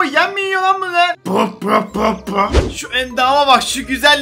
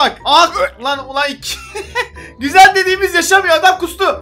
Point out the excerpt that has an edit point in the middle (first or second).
first